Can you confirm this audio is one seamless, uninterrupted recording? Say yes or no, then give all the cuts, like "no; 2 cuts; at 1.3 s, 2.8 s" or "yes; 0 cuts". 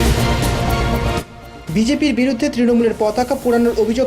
no; 1 cut; at 1.0 s